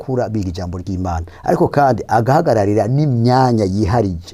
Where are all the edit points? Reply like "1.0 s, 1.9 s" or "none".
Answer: none

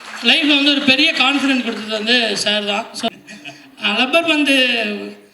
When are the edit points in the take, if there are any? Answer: 3.1 s

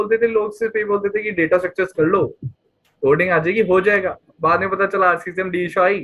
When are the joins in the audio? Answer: none

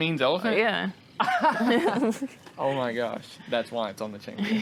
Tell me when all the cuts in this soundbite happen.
none

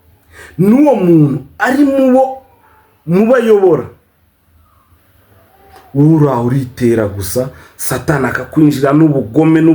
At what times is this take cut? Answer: 5.0 s

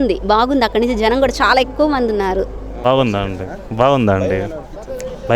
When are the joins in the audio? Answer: 2.6 s

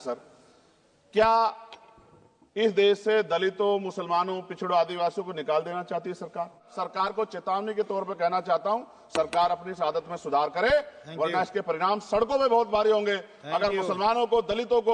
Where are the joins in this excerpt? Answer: 6.8 s

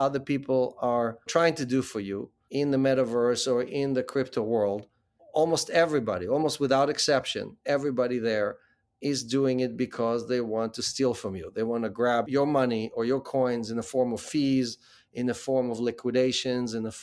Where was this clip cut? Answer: 1.2 s, 2.3 s

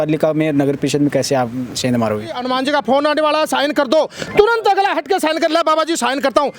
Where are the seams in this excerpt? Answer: 2.4 s

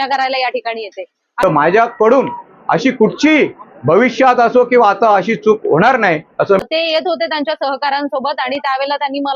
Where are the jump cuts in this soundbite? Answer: 1.3 s, 6.6 s

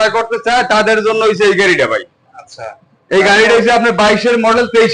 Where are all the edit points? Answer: none

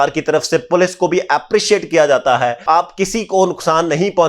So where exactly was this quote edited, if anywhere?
2.6 s

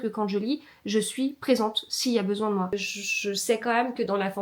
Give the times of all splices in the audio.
2.7 s

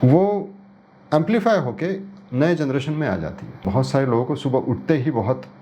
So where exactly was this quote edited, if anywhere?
3.7 s

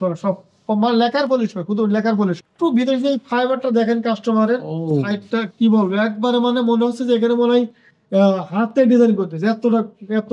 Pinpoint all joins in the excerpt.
2.4 s

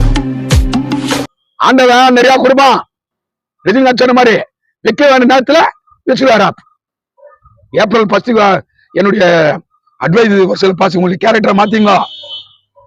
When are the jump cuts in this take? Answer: 1.3 s

